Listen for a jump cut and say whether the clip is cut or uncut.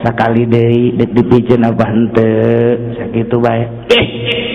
uncut